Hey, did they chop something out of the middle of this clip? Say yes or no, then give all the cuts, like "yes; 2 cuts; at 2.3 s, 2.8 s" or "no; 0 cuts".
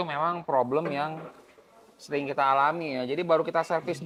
no; 0 cuts